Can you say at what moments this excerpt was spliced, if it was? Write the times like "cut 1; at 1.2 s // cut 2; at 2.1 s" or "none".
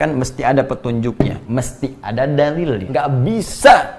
cut 1; at 2.8 s